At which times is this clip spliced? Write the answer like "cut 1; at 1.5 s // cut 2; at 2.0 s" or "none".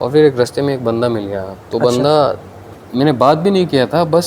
none